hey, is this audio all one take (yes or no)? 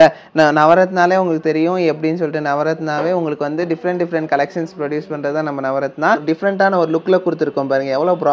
no